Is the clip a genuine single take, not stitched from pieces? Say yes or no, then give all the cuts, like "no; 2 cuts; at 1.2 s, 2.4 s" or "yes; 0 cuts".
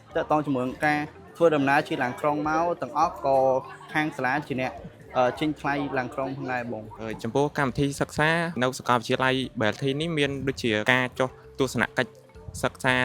no; 3 cuts; at 6.9 s, 8.5 s, 10.8 s